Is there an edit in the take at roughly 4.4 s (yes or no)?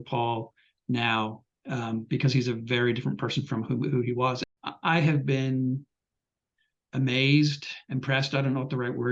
yes